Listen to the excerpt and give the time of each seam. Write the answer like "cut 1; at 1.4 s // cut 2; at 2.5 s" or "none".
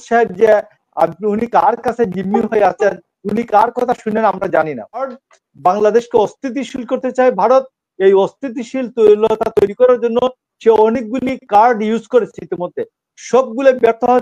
cut 1; at 5.1 s